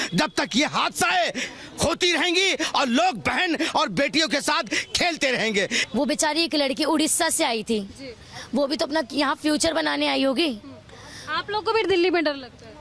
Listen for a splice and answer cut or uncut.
cut